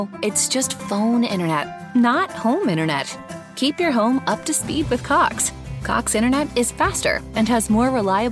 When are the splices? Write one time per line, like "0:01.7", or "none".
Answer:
none